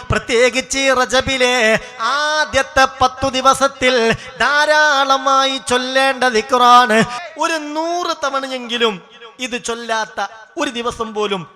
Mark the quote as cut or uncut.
cut